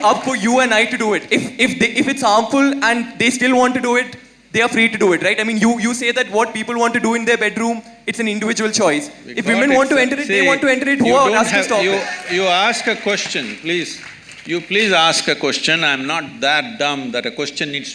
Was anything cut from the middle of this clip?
no; 0 cuts

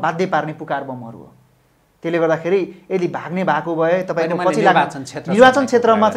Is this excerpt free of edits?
yes; 0 cuts

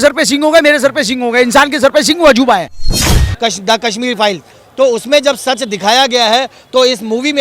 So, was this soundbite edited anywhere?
yes; 1 cut; at 3.0 s

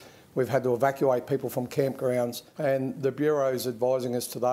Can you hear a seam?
yes; 1 cut; at 2.4 s

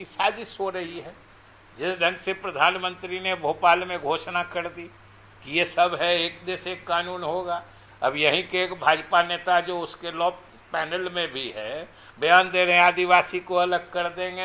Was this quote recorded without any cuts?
yes; 0 cuts

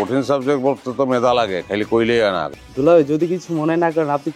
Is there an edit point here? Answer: yes; 1 cut; at 2.5 s

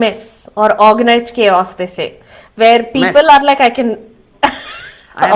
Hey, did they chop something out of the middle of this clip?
no; 0 cuts

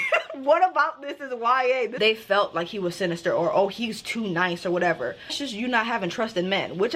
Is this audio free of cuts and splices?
no; 2 cuts; at 1.9 s, 5.4 s

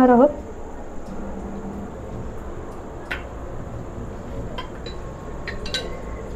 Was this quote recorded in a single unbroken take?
yes; 0 cuts

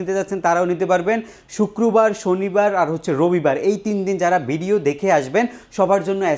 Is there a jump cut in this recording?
no; 0 cuts

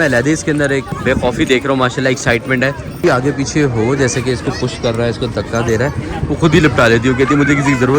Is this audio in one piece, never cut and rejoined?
no; 2 cuts; at 0.9 s, 2.9 s

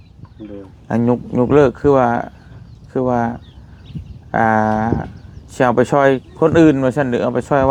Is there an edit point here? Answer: no; 0 cuts

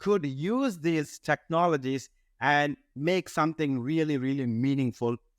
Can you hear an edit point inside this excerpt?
no; 0 cuts

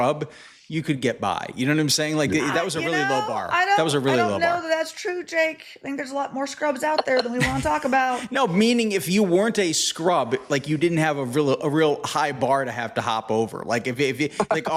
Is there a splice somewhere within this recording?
no; 0 cuts

